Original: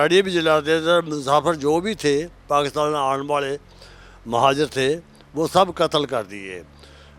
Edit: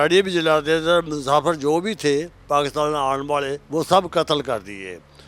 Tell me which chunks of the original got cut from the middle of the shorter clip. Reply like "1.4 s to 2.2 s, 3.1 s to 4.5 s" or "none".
3.6 s to 5.2 s

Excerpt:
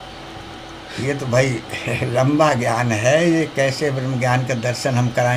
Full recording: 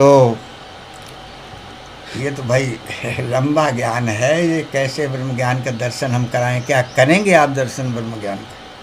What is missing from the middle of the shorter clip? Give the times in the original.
none

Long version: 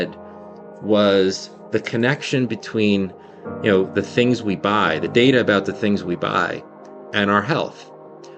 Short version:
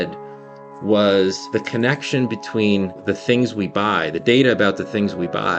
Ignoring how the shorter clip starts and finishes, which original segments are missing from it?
1.4 s to 1.6 s, 3.2 s to 3.9 s

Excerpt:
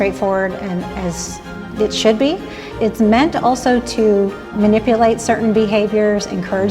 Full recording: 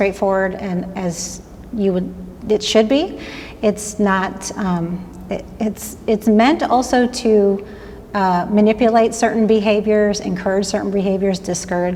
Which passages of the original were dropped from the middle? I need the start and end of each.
1.5 s to 2.2 s, 3.3 s to 5.9 s, 7.8 s to 8.4 s

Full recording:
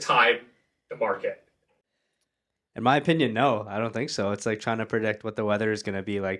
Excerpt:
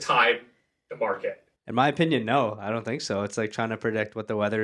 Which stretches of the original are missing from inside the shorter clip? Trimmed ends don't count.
1.5 s to 2.6 s

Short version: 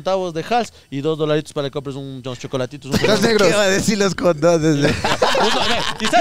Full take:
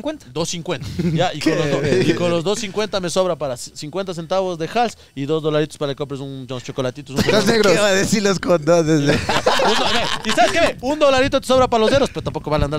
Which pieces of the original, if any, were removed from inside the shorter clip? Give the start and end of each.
none

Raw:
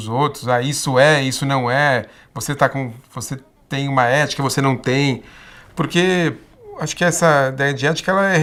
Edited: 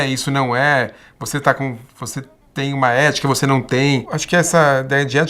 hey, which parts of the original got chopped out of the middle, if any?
5.3 s to 6.8 s

